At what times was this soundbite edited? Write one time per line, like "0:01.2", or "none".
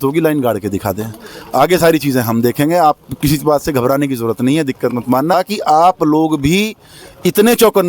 0:05.3